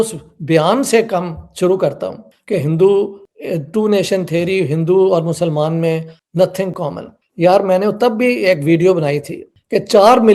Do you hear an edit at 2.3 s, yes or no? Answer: yes